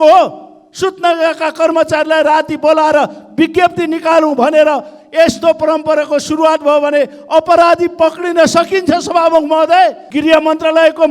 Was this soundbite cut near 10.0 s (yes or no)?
yes